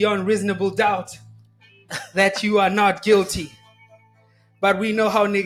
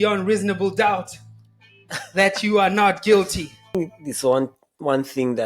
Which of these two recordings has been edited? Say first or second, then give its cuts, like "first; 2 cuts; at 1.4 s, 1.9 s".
second; 1 cut; at 3.8 s